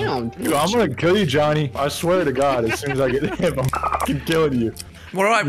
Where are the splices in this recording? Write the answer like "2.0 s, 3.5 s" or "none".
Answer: none